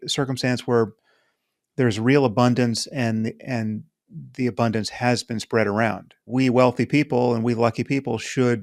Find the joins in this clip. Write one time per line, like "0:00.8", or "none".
0:06.3